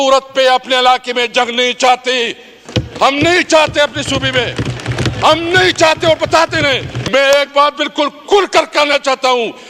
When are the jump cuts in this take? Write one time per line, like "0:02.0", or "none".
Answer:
0:06.9

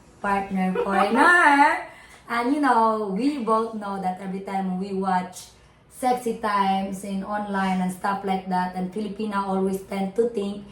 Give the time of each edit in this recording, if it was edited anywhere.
none

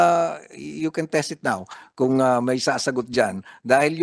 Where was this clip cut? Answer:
none

